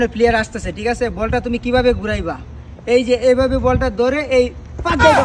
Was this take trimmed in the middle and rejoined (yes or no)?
no